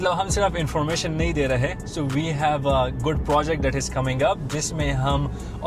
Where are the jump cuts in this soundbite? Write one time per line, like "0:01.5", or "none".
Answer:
none